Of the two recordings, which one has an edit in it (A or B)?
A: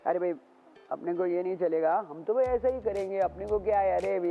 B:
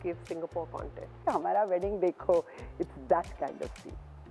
B